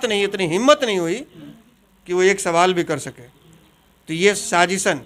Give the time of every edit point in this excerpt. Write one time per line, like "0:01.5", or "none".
none